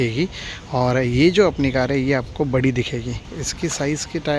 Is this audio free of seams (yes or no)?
no